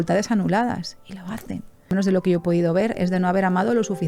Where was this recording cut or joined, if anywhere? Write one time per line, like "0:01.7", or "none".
0:01.9